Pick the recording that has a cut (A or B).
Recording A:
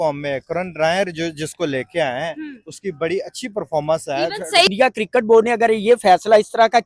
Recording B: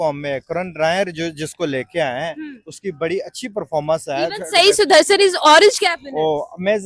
A